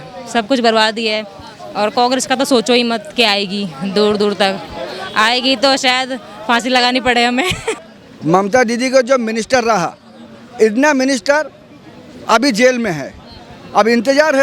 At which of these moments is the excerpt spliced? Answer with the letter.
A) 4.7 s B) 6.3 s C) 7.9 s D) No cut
C